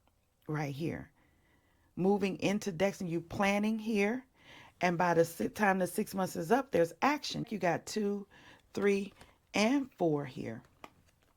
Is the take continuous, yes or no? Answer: no